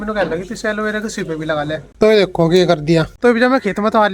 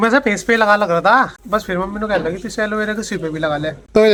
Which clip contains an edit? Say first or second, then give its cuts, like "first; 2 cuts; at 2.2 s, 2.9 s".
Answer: first; 1 cut; at 3.1 s